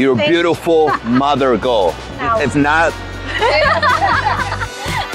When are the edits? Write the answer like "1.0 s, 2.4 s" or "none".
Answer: 2.1 s, 3.2 s